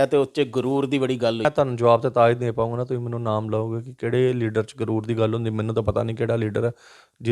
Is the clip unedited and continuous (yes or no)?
no